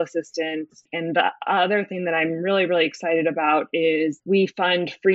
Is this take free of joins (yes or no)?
no